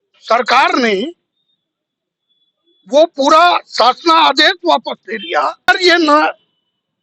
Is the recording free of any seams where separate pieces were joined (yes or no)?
no